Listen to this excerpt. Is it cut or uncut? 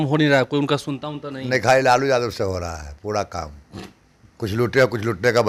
uncut